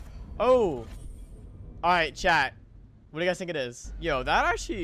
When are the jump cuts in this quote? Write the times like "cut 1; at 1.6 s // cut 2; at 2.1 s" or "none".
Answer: cut 1; at 3.9 s